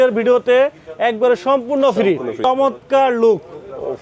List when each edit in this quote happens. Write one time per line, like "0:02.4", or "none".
0:02.4

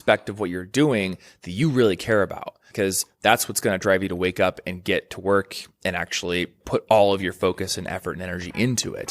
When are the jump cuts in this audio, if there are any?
0:02.6
0:06.6

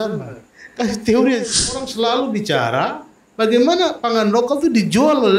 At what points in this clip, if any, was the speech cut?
0:01.8

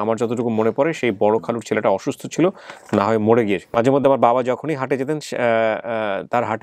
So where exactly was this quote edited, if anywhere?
0:03.6

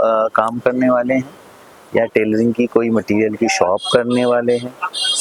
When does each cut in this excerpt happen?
none

